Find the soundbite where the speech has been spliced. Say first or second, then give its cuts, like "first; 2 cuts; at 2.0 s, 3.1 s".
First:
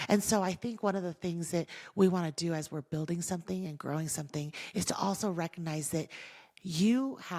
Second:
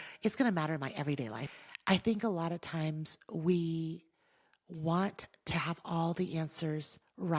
second; 1 cut; at 1.4 s